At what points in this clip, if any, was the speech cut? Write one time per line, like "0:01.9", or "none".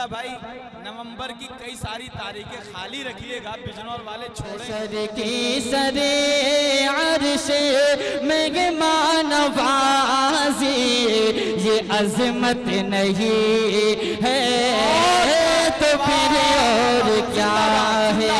0:04.7